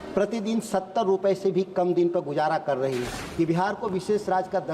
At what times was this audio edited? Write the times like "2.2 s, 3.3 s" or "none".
3.2 s